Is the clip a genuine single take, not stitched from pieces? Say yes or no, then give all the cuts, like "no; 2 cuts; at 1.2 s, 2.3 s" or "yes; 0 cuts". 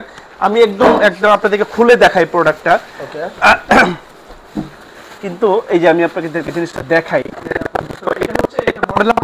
yes; 0 cuts